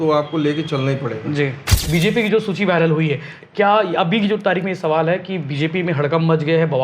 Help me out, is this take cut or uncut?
cut